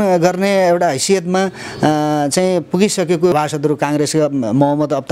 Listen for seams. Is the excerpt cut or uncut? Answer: cut